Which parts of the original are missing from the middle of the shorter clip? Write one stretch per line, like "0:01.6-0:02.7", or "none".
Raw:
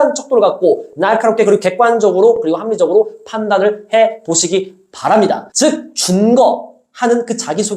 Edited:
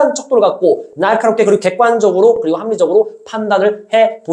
none